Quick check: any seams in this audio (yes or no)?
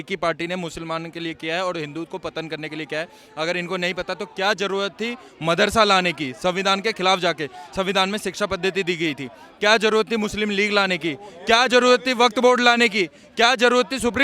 no